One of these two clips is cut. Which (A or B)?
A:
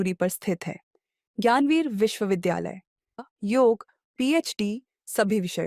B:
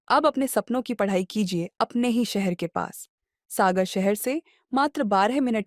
A